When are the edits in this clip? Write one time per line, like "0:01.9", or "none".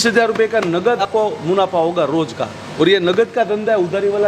0:01.0

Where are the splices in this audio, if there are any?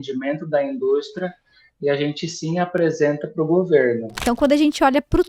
0:04.2

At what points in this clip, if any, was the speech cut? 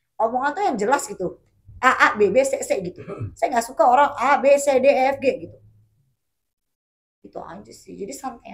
none

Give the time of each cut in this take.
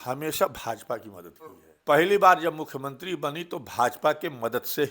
0:01.7

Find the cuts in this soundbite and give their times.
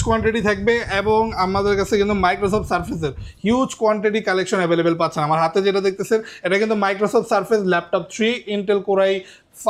none

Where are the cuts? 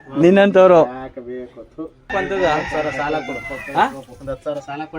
0:02.1

